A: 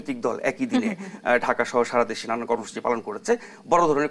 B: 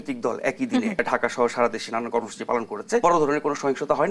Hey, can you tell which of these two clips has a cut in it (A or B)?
B